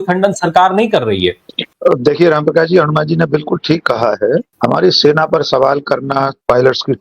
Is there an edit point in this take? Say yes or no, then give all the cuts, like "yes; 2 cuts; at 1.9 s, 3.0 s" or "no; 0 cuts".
no; 0 cuts